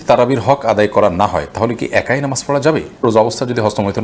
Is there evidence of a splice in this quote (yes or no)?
yes